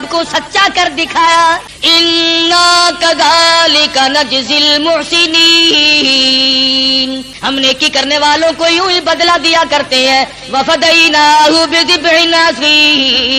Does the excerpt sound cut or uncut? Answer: cut